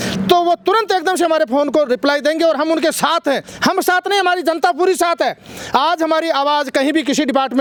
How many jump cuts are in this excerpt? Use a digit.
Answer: 0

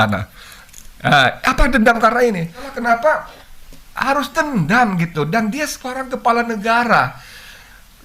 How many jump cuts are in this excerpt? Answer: 1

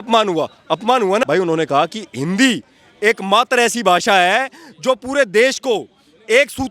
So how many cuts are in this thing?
1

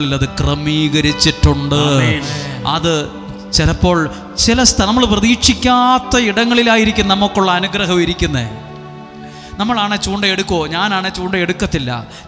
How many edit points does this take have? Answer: 0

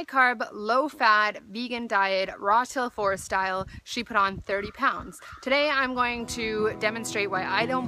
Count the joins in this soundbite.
1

